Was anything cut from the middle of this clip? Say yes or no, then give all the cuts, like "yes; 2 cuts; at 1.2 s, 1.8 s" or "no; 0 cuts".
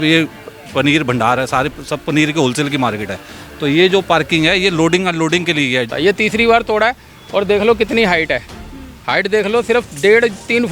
yes; 1 cut; at 5.9 s